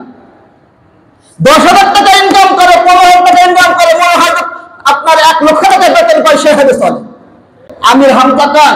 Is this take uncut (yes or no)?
no